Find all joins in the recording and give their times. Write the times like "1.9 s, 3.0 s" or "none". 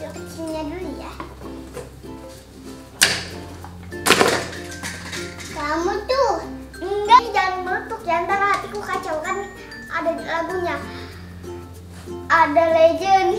7.2 s